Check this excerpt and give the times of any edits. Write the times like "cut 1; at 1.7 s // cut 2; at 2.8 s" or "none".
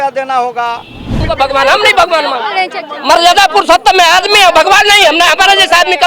cut 1; at 1.3 s